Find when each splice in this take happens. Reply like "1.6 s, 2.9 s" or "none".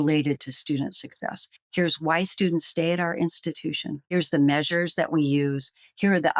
4.0 s